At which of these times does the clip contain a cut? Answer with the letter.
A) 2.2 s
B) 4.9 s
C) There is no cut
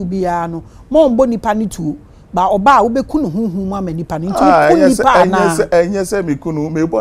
C